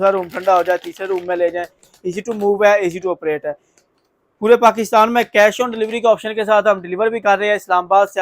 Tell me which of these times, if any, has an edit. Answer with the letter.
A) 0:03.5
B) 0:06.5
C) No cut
C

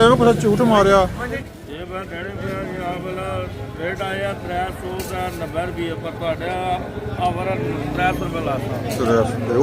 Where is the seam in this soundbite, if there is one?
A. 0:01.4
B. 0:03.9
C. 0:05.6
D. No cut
A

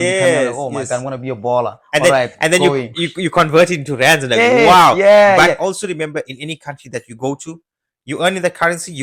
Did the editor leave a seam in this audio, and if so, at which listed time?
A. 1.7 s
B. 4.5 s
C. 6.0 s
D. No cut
D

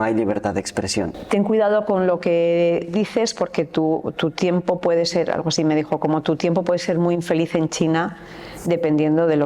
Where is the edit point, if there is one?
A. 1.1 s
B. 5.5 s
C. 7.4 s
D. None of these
A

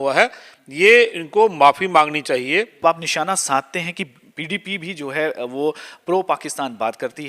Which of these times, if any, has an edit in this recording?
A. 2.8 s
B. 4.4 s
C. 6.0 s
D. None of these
A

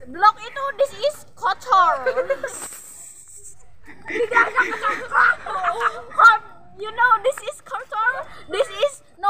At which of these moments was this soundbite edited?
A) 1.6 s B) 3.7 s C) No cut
C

